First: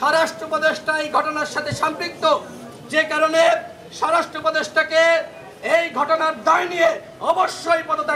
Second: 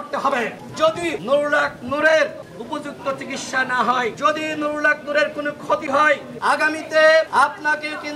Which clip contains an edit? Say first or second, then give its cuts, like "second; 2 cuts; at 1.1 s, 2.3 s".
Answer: second; 5 cuts; at 0.9 s, 2.5 s, 4.2 s, 6.3 s, 7.3 s